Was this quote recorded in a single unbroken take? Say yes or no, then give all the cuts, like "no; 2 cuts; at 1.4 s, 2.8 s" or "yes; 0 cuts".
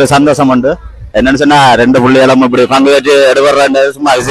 yes; 0 cuts